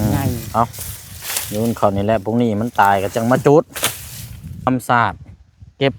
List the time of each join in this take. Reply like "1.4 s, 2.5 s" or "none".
4.7 s